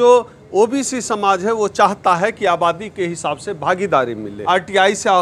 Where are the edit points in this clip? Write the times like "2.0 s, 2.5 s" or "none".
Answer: 4.3 s